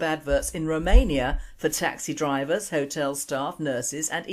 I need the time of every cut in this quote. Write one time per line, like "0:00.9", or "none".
0:02.0